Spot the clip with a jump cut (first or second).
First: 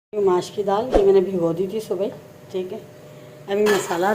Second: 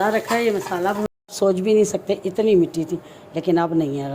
second